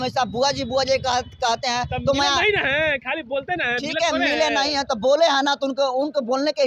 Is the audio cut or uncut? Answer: uncut